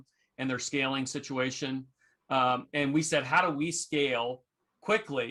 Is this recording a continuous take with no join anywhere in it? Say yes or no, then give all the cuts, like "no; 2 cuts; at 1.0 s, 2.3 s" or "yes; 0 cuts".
yes; 0 cuts